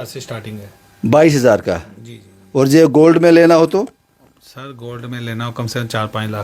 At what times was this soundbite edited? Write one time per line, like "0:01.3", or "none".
none

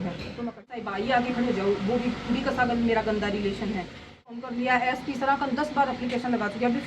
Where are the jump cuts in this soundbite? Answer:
0:00.9
0:04.4

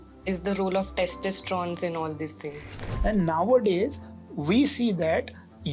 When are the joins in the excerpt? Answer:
0:02.8

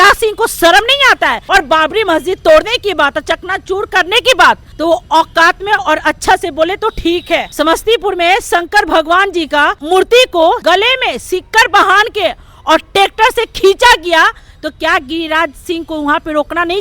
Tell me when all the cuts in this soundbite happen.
0:01.4
0:04.7
0:07.5
0:09.8
0:10.6

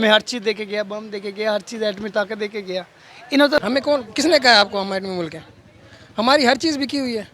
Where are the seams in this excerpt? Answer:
0:03.6

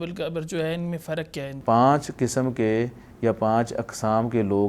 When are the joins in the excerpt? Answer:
0:01.5

